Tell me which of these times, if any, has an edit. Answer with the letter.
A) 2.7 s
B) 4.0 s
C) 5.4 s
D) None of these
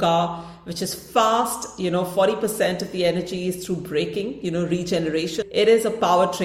C